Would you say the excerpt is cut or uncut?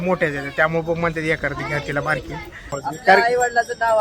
cut